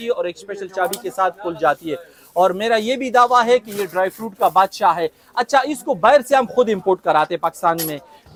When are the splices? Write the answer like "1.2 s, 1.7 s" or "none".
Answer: none